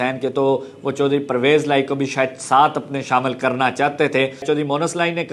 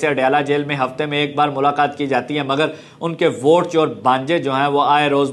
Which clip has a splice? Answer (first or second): first